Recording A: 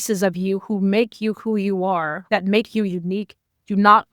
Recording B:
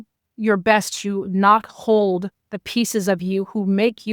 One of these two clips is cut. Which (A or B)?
A